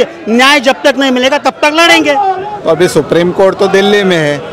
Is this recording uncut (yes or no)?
no